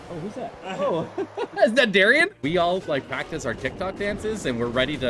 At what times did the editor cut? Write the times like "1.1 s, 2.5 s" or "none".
2.4 s